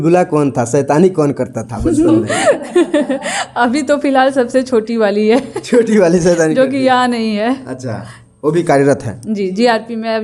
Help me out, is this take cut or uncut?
uncut